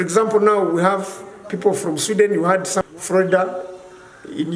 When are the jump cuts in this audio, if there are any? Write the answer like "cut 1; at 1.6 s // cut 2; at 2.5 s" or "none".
cut 1; at 2.8 s